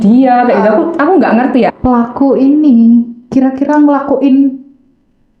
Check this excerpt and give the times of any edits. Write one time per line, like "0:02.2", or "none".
0:01.7